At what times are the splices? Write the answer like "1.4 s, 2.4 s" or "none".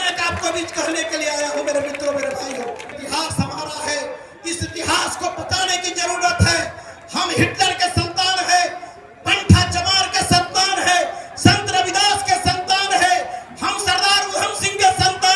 3.0 s